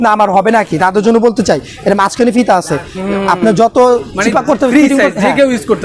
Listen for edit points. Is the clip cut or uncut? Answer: uncut